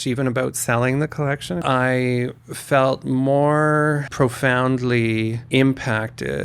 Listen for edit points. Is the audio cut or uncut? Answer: cut